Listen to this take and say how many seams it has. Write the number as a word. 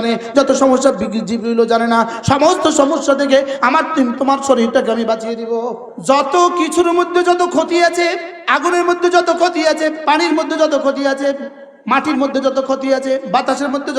two